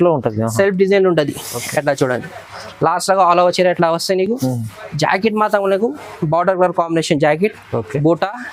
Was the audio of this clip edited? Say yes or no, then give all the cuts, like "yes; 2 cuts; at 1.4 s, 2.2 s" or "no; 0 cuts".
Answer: no; 0 cuts